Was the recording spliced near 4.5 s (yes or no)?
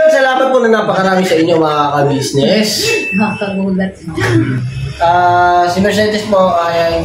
yes